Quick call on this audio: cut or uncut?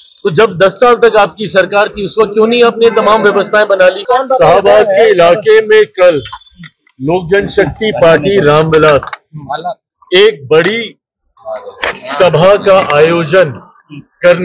cut